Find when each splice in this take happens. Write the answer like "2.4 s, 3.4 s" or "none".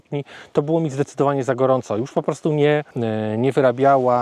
3.0 s

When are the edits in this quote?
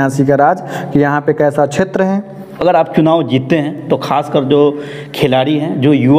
2.4 s

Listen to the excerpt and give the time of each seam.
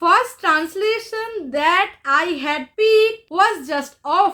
2.7 s, 3.2 s

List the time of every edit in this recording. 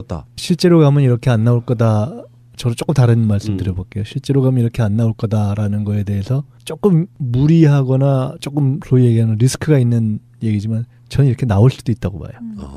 6.9 s

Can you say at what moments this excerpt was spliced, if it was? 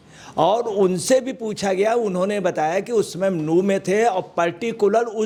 none

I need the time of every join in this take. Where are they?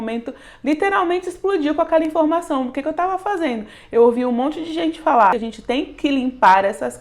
5.3 s

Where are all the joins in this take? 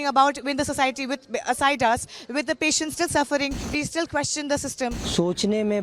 3.6 s, 5.0 s

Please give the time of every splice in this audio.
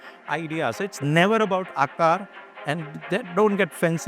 none

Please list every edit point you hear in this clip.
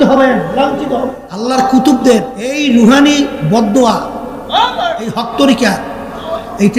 1.5 s, 2.6 s, 5.2 s

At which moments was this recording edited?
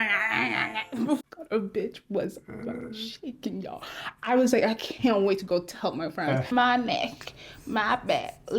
1.2 s, 6.5 s

